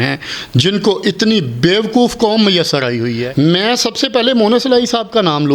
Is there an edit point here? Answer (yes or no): yes